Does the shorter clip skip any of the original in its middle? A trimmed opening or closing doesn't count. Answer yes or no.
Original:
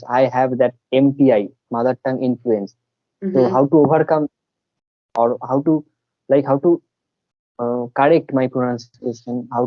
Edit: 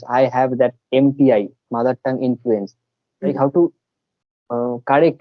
yes